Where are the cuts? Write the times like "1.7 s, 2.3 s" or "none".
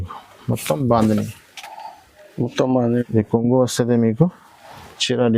3.0 s